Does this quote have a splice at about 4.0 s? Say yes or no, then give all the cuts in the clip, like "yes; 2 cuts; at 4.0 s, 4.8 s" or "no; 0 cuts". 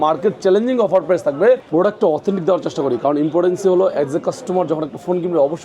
no; 1 cut; at 1.6 s